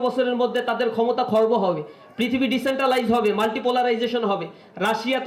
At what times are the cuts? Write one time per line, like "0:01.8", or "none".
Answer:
none